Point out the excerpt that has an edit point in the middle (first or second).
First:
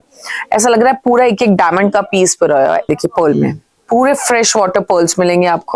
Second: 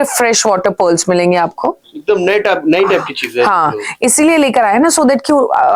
first